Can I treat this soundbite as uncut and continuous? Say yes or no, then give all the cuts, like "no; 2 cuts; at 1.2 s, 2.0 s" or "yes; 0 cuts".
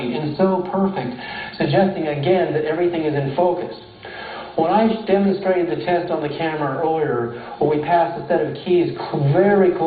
no; 1 cut; at 5.5 s